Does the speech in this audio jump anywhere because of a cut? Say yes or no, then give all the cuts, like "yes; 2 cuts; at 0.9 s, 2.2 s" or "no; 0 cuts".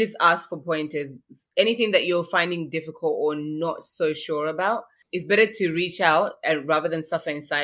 yes; 1 cut; at 5.0 s